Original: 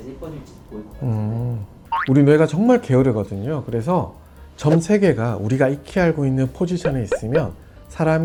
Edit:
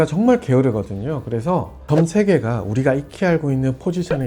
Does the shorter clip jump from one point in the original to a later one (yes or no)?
yes